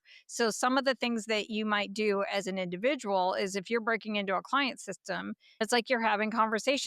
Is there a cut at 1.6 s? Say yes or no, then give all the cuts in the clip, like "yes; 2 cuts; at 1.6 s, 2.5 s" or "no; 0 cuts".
no; 1 cut; at 5.6 s